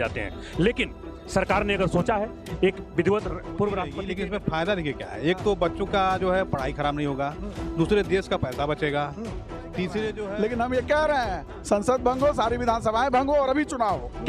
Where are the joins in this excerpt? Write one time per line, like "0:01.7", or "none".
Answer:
0:04.0
0:10.2